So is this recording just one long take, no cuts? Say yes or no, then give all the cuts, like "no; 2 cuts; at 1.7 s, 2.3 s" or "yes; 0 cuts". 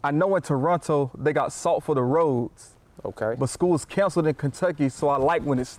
yes; 0 cuts